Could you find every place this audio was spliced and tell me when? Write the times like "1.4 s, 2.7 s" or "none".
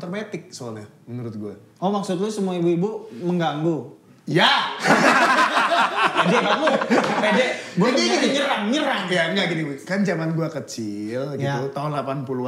none